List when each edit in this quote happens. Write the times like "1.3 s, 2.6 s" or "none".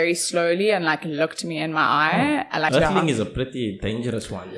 2.7 s